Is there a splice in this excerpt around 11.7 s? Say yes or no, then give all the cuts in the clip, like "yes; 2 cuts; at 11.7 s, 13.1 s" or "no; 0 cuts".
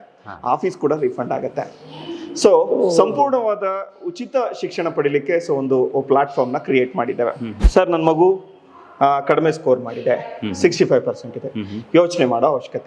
no; 1 cut; at 7.5 s